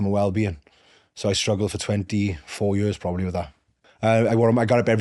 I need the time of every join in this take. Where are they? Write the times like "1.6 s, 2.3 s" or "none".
3.6 s

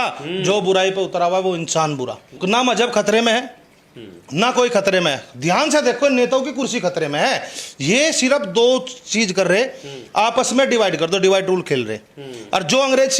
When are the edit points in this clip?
none

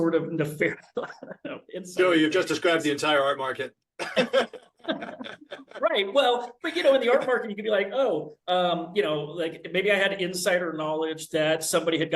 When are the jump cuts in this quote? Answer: none

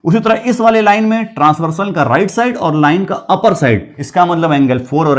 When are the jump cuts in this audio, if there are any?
4.0 s

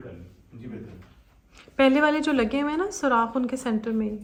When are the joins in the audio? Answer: none

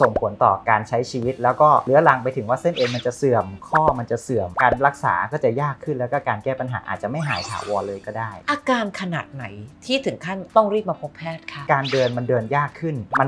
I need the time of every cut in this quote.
8.4 s, 11.6 s

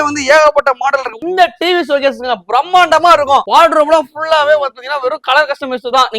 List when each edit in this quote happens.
1.2 s, 3.5 s

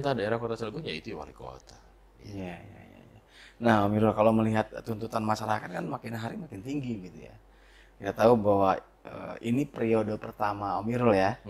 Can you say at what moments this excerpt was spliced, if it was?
none

